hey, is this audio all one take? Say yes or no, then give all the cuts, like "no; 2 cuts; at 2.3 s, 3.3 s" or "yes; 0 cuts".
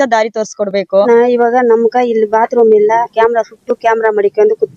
no; 2 cuts; at 1.1 s, 3.1 s